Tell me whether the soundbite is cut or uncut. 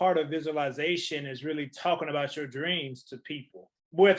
uncut